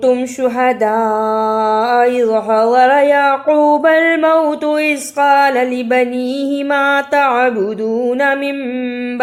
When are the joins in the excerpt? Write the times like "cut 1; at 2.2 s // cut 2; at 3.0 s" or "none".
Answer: none